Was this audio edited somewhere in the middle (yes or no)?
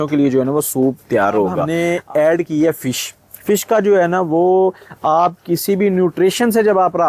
yes